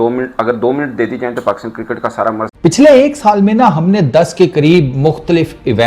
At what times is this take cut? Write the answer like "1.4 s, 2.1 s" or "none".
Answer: 2.5 s